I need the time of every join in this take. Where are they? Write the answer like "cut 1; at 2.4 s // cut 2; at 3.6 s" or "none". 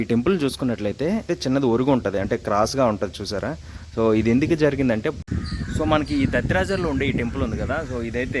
cut 1; at 1.3 s // cut 2; at 5.2 s